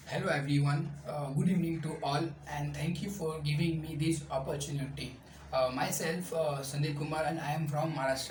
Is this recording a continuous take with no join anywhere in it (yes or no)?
yes